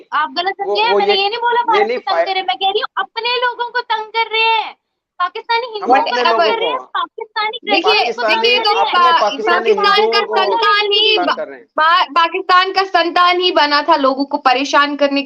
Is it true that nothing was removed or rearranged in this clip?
yes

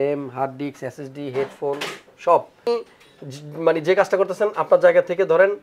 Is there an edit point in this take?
yes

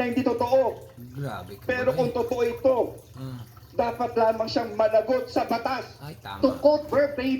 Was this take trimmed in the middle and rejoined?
yes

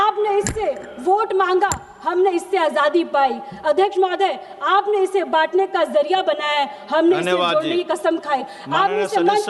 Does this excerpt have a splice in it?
no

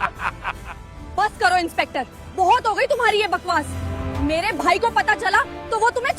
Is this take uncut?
no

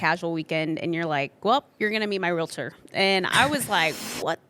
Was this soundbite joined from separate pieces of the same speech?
no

